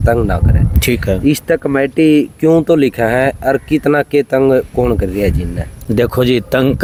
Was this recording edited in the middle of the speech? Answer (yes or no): no